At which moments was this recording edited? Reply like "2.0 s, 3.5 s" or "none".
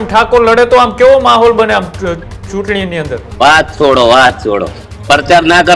3.3 s